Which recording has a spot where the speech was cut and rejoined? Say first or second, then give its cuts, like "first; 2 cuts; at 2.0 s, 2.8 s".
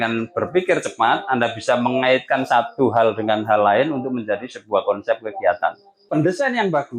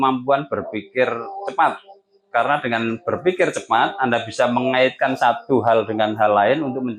first; 1 cut; at 5.9 s